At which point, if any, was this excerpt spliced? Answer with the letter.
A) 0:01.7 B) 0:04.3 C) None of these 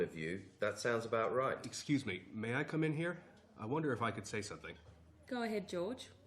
A